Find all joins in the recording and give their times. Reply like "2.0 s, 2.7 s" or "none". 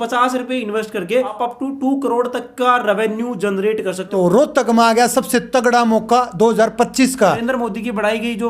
1.4 s, 4.1 s, 7.4 s